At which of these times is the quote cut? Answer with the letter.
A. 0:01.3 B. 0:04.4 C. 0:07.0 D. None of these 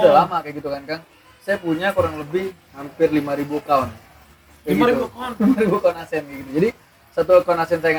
D